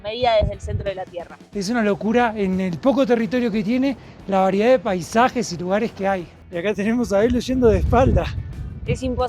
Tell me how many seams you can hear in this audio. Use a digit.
2